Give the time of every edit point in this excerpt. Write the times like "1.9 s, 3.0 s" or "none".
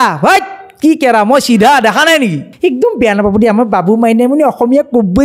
2.5 s